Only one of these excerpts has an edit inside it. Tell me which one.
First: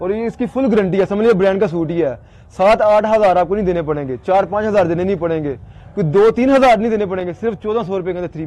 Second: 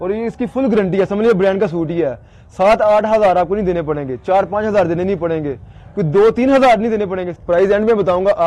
second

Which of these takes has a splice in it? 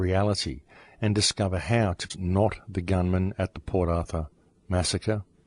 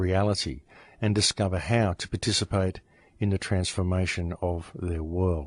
second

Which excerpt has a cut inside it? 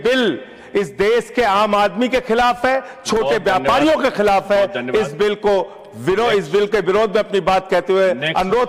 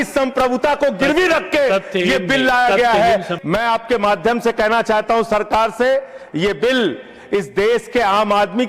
second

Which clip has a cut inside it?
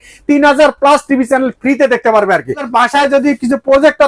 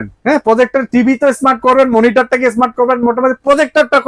first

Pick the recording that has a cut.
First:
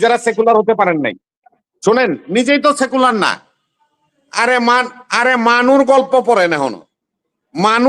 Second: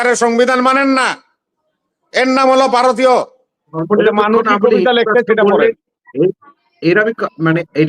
second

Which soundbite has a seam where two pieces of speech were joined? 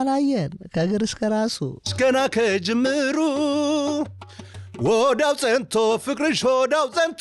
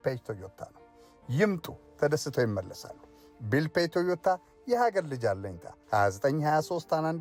first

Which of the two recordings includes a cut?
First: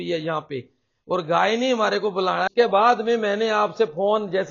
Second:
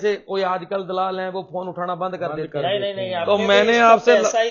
first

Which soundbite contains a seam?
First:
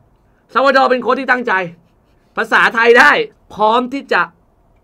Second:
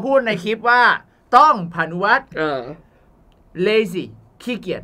first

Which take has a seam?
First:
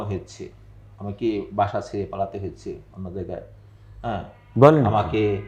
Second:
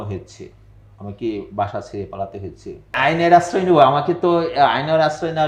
second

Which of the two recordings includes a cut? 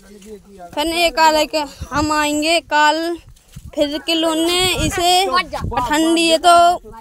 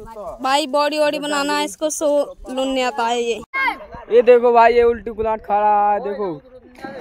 second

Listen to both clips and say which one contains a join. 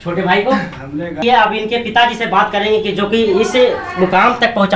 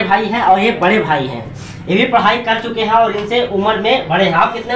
first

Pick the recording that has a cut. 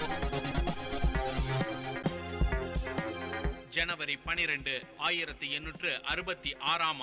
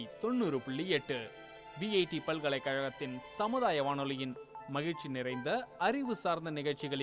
first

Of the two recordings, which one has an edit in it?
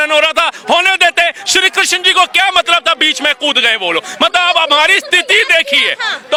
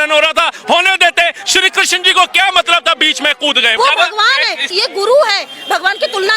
second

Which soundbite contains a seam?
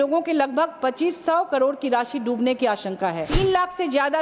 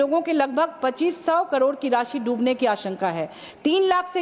first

